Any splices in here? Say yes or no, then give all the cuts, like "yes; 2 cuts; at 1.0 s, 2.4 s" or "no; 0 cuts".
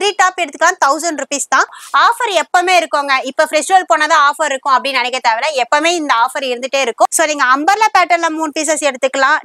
yes; 2 cuts; at 1.8 s, 7.1 s